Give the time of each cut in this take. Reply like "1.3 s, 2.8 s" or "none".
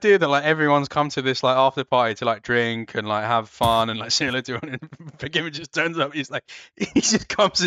none